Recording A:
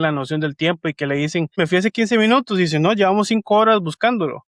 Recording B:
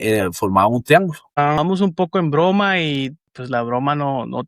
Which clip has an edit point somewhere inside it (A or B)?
B